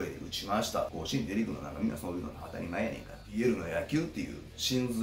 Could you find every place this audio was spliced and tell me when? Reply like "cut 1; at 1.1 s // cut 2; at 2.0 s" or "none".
cut 1; at 0.9 s // cut 2; at 3.3 s